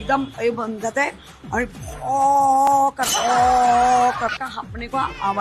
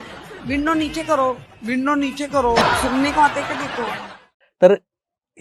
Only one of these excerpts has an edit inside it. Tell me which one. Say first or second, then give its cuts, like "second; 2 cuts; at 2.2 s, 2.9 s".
second; 1 cut; at 4.2 s